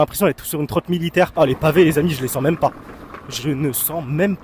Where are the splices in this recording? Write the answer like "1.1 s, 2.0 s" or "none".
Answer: 1.3 s